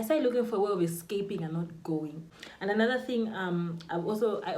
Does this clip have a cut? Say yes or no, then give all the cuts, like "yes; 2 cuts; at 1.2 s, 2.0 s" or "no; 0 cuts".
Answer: yes; 1 cut; at 2.2 s